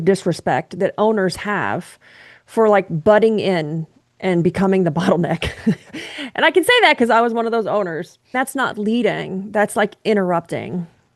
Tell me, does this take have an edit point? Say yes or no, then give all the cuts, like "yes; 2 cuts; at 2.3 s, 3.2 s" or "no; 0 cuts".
yes; 1 cut; at 8.4 s